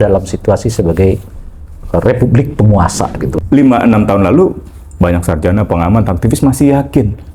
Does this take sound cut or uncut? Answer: cut